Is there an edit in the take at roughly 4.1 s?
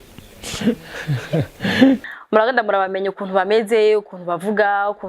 no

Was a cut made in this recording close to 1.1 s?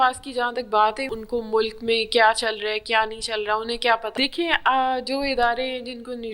yes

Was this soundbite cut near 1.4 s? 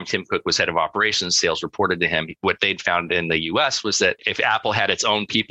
no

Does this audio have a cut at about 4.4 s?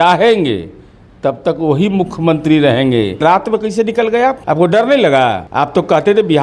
yes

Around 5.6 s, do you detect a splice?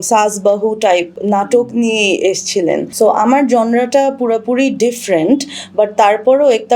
no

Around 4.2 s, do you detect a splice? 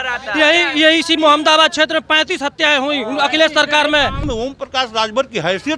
yes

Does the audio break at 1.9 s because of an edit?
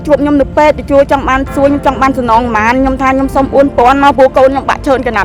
no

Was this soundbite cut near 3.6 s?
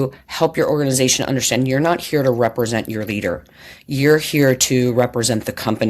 no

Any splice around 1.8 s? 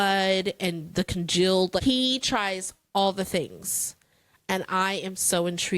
yes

